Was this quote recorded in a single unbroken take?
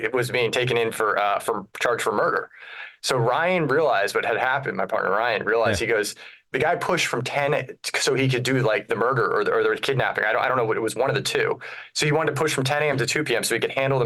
yes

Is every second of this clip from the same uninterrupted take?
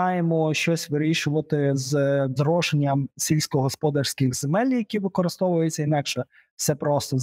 yes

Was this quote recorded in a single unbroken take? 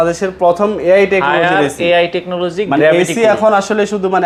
yes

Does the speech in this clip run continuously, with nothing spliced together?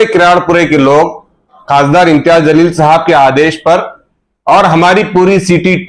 no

